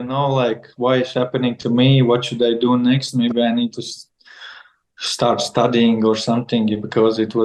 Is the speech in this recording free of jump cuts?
yes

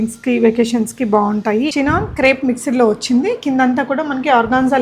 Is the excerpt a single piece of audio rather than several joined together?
no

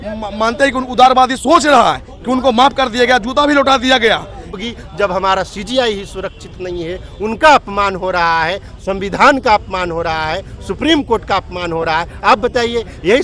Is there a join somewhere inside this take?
yes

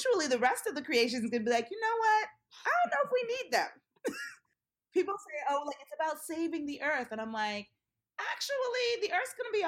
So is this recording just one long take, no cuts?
no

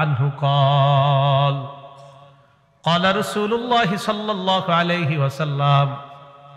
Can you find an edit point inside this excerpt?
no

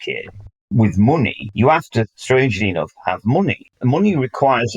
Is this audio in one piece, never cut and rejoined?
no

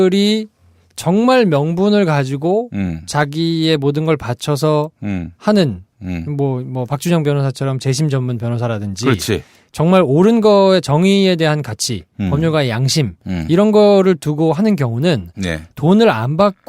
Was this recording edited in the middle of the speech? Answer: yes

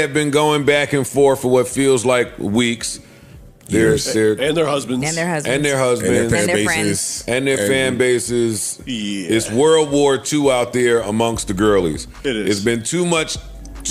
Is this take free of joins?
yes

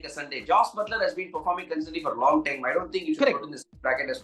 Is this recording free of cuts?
yes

